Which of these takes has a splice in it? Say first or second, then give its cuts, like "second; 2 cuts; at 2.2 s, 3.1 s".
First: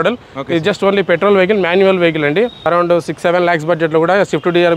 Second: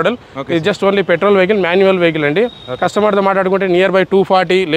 first; 1 cut; at 2.6 s